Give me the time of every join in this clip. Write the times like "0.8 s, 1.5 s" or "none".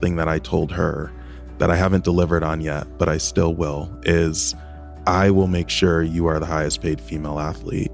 none